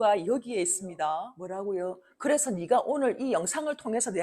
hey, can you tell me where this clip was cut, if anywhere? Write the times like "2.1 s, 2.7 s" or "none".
1.3 s